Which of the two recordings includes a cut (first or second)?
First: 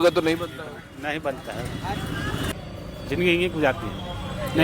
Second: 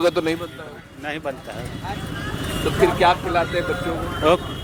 first